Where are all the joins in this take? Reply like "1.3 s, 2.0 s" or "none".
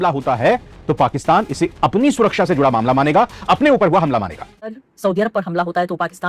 4.7 s